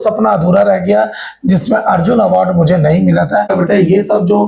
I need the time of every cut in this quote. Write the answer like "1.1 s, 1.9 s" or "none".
3.5 s